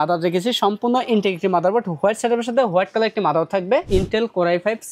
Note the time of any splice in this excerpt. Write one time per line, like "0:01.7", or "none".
0:03.9